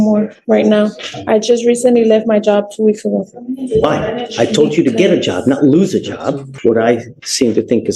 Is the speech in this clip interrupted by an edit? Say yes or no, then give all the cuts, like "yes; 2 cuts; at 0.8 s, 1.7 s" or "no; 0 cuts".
yes; 1 cut; at 6.5 s